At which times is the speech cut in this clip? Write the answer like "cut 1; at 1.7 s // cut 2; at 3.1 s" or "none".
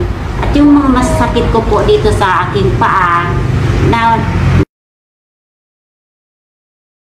none